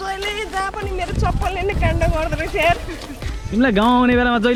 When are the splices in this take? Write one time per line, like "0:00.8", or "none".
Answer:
none

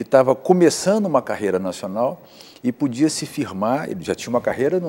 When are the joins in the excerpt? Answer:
none

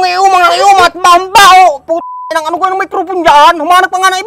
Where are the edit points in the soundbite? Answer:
none

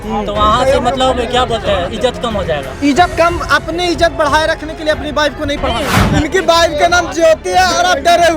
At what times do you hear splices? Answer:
0:06.1

